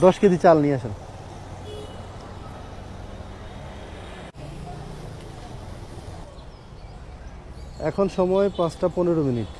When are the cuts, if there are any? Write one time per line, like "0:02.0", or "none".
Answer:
0:04.3
0:06.2